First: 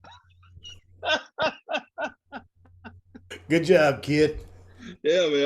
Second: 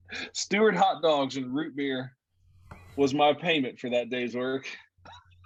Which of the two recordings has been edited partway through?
first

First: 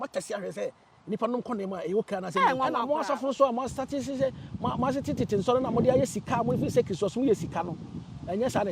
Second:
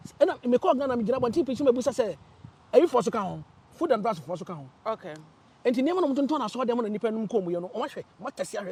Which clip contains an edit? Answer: first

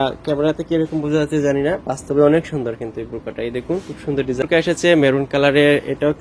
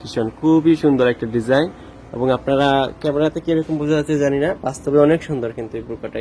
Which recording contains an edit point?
first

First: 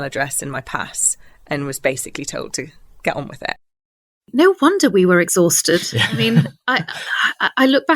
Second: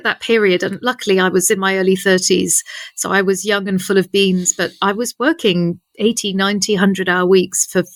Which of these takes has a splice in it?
first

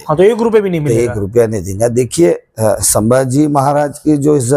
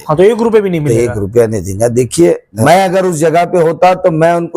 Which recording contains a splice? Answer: second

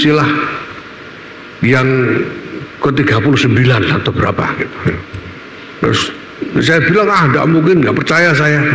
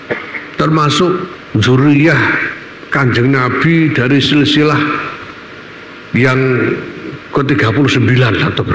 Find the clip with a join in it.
second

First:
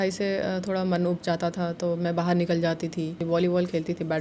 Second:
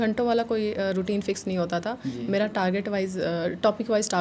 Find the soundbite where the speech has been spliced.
first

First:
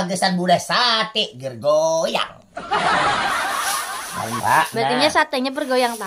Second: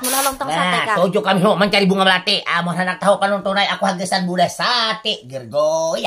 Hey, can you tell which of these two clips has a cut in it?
first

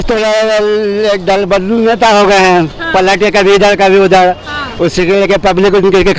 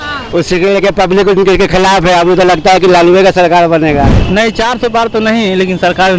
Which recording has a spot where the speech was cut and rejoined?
second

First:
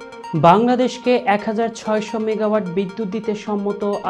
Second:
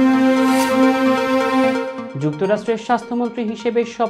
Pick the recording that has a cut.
second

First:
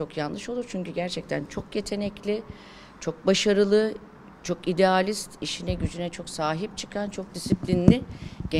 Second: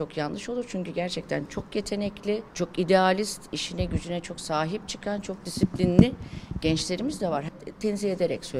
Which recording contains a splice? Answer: second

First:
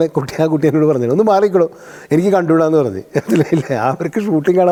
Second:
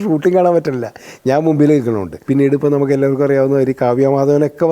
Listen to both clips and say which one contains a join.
second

